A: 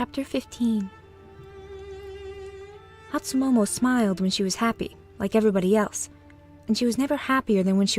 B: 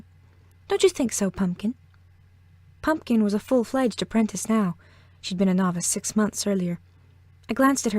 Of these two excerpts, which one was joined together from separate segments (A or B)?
B